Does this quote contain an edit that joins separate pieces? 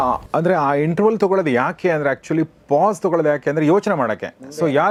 no; 0 cuts

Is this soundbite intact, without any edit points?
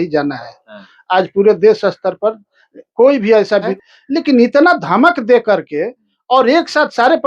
no; 1 cut; at 3.7 s

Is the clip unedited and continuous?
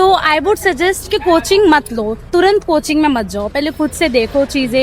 yes; 0 cuts

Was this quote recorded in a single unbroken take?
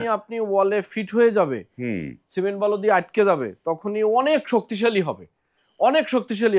yes; 0 cuts

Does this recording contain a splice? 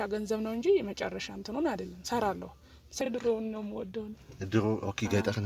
yes; 1 cut; at 3.0 s

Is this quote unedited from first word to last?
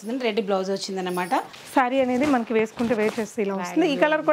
no; 1 cut; at 1.5 s

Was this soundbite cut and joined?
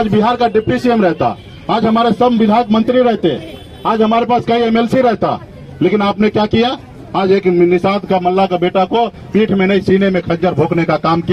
no; 0 cuts

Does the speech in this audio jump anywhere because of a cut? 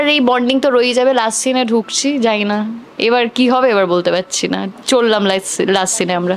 no; 0 cuts

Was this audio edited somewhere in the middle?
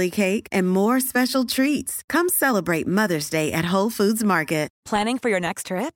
no; 0 cuts

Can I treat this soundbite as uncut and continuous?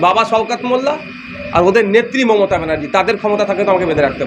yes; 0 cuts

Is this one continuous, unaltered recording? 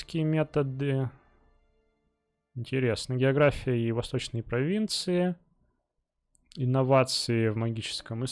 yes; 0 cuts

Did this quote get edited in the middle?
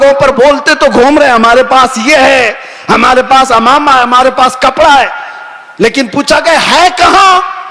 no; 0 cuts

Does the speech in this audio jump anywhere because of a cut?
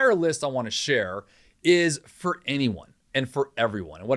no; 0 cuts

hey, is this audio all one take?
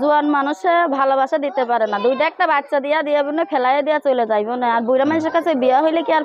yes; 0 cuts

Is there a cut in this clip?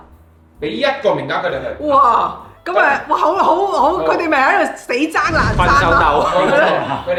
no; 0 cuts

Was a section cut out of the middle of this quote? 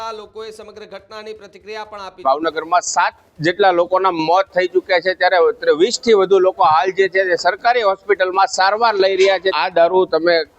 yes; 2 cuts; at 2.2 s, 9.5 s

